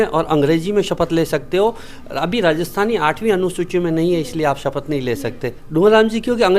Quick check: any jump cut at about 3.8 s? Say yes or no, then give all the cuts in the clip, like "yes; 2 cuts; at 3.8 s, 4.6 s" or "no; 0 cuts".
no; 1 cut; at 5.6 s